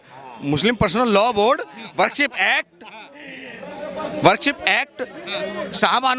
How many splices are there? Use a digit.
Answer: 0